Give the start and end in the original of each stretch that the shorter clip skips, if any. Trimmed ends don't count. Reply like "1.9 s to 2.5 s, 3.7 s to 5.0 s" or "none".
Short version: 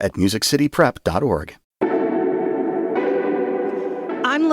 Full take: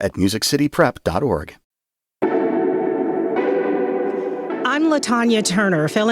1.6 s to 2.0 s